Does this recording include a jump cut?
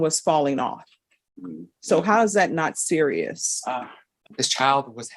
yes; 1 cut; at 4.2 s

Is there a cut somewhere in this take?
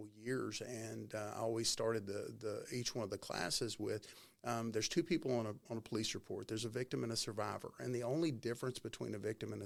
no; 0 cuts

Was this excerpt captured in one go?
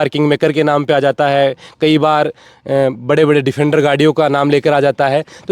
yes; 0 cuts

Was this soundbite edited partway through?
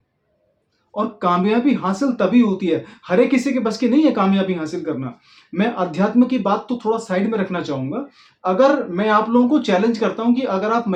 no; 0 cuts

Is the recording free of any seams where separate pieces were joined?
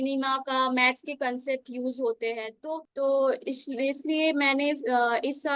no; 1 cut; at 2.9 s

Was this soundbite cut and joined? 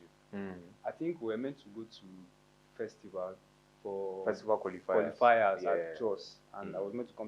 no; 0 cuts

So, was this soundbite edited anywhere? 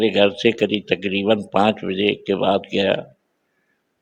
no; 0 cuts

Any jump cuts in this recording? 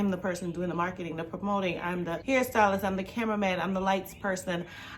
yes; 1 cut; at 2.2 s

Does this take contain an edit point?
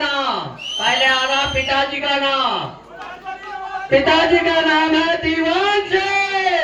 no; 0 cuts

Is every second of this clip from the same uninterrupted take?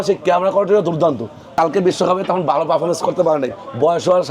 no; 1 cut; at 1.4 s

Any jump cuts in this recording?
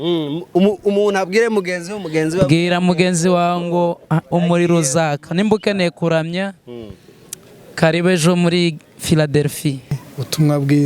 yes; 1 cut; at 10.0 s

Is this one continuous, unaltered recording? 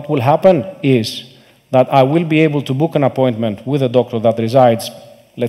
yes; 0 cuts

